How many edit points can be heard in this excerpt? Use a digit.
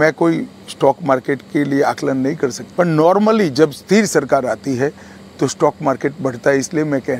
1